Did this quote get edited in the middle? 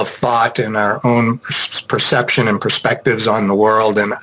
no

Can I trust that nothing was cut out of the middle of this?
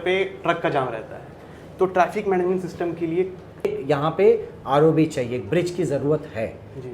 no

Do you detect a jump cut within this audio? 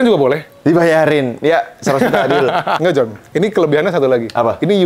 yes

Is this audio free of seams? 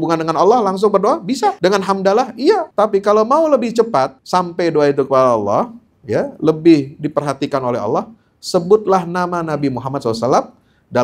no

